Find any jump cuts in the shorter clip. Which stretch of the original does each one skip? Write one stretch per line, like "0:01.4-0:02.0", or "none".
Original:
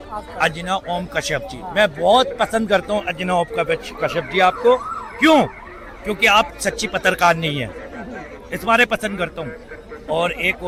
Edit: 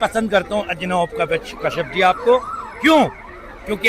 none